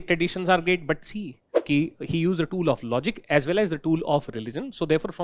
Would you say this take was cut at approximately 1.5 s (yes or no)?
yes